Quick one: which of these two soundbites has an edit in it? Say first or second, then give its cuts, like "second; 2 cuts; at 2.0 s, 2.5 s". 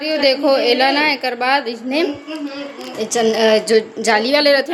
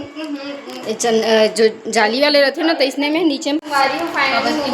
second; 1 cut; at 3.6 s